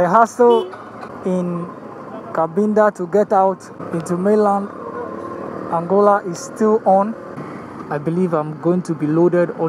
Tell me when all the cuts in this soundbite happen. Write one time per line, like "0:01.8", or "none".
0:01.1
0:03.7
0:07.8